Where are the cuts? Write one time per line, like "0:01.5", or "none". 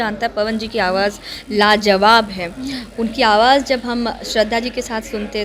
none